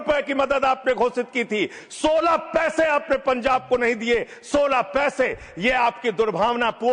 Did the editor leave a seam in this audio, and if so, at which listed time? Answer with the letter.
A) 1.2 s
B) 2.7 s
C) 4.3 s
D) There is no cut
D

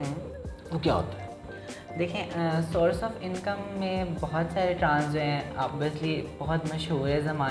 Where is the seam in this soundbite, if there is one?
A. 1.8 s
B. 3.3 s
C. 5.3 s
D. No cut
D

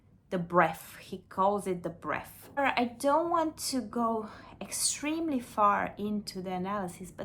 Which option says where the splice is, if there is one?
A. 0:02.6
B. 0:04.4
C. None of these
A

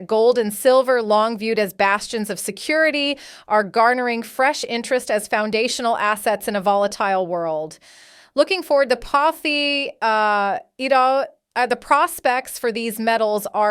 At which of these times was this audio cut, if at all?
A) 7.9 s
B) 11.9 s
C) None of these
C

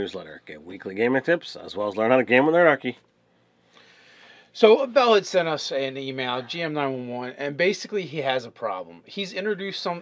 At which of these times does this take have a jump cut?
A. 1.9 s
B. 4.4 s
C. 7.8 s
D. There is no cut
C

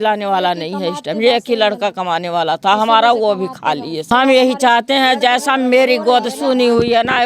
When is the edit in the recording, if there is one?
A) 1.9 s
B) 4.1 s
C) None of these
B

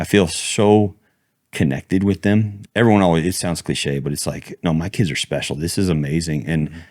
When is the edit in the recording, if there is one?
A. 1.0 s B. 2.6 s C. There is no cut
B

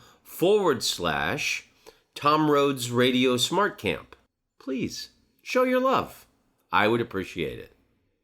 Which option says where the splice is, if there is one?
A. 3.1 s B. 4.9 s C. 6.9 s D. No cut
C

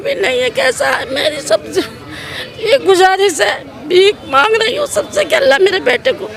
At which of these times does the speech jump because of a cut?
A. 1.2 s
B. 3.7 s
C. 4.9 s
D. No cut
D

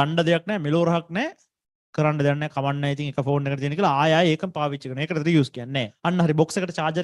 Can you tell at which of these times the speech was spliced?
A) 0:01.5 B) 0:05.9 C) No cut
B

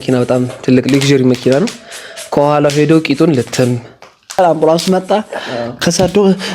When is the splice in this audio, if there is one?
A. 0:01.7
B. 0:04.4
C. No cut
B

